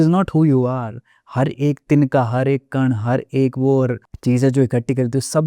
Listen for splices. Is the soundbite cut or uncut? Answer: cut